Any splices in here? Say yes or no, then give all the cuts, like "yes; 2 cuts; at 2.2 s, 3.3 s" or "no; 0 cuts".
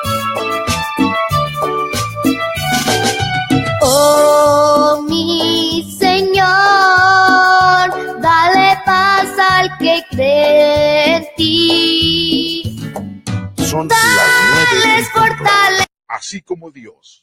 yes; 1 cut; at 15.8 s